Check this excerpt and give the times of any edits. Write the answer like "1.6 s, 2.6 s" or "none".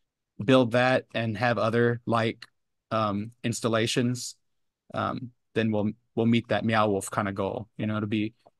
none